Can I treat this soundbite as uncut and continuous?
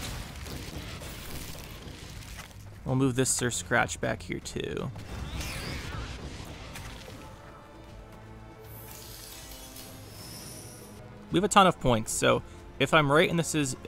no; 1 cut; at 11.0 s

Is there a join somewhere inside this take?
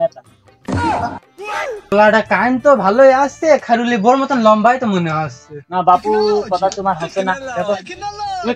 yes; 1 cut; at 1.9 s

